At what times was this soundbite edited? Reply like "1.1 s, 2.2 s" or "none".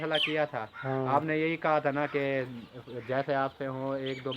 none